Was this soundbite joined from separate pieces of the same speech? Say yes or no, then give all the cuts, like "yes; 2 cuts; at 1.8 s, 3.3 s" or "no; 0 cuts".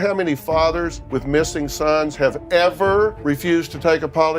yes; 2 cuts; at 1.0 s, 3.2 s